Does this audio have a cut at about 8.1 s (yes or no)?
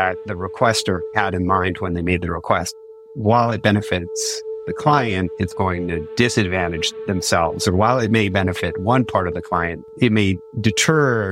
no